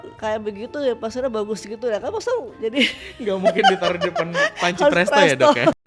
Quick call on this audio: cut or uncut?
uncut